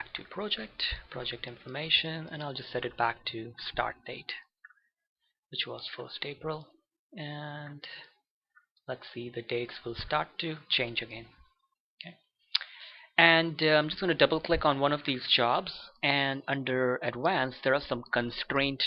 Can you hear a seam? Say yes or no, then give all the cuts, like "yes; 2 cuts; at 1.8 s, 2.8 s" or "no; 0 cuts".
no; 0 cuts